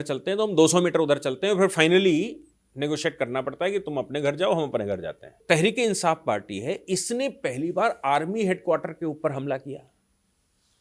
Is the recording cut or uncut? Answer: cut